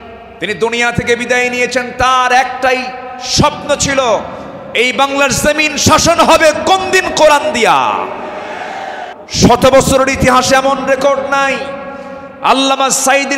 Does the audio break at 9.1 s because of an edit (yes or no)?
yes